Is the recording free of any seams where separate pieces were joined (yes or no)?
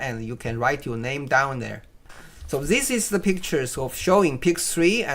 no